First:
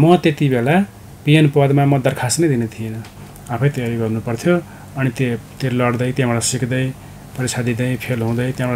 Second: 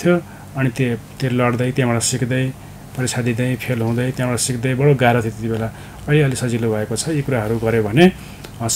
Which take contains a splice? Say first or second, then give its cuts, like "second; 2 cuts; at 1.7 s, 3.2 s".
first; 1 cut; at 3.4 s